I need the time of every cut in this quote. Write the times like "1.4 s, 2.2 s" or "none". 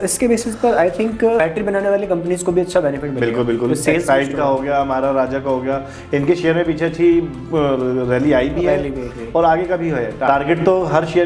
10.3 s